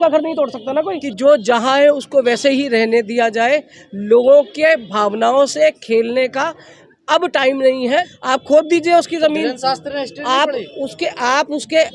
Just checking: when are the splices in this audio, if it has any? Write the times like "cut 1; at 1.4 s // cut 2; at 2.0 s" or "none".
cut 1; at 1.0 s // cut 2; at 8.1 s